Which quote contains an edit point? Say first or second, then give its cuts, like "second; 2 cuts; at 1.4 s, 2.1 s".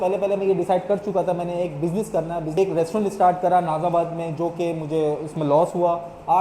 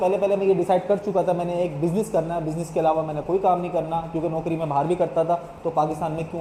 first; 1 cut; at 2.6 s